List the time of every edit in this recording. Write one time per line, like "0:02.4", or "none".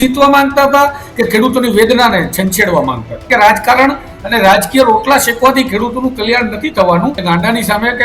0:03.2
0:07.2